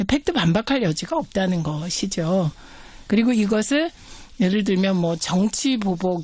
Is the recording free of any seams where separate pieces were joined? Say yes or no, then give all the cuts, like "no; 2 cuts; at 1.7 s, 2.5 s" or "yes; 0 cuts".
yes; 0 cuts